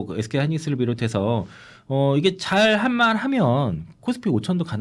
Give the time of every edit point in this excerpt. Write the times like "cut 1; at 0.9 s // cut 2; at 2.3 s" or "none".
none